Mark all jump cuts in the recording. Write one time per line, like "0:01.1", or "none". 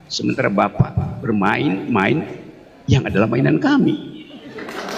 none

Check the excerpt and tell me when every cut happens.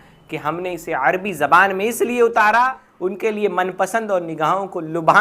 0:02.8

